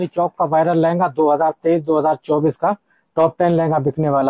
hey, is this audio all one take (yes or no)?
yes